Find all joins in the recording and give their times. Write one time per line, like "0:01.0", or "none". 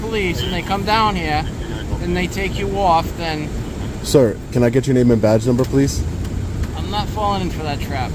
none